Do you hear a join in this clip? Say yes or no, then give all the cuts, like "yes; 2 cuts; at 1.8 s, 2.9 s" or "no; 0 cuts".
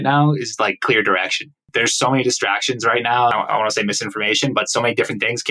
yes; 2 cuts; at 1.7 s, 3.3 s